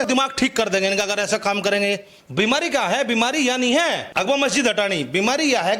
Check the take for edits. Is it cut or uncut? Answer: cut